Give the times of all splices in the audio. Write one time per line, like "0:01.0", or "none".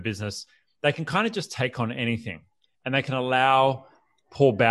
none